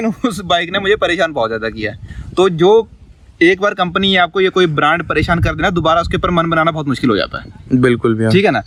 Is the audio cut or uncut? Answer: uncut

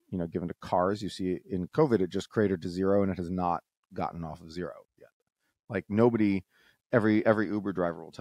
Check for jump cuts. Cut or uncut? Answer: uncut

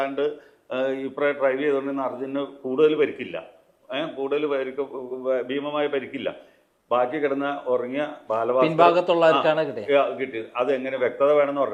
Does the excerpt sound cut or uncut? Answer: uncut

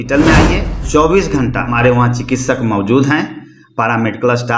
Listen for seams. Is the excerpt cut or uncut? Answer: cut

